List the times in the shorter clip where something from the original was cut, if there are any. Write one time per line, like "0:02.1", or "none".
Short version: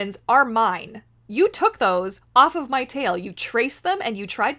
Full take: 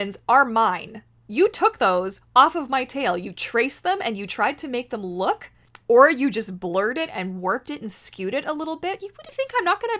none